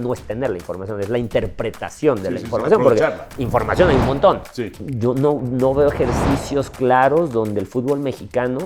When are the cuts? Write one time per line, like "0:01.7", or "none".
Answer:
0:04.9